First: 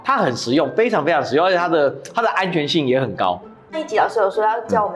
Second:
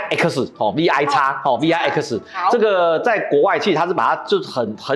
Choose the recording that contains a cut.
first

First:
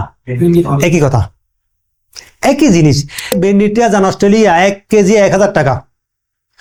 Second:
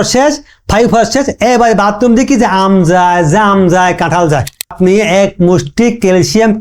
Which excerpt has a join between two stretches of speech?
second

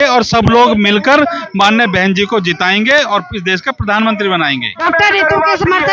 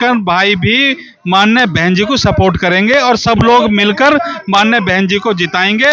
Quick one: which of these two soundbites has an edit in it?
first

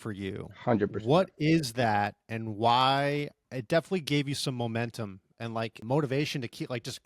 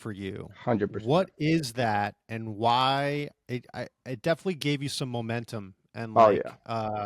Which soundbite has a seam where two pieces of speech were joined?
first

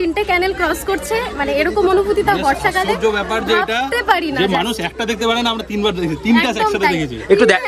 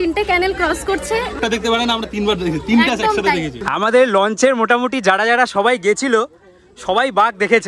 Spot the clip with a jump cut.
second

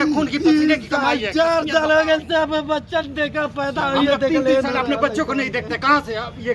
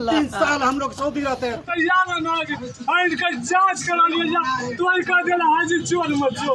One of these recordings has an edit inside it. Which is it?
second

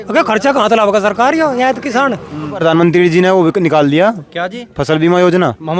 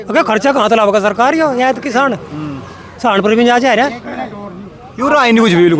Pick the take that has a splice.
first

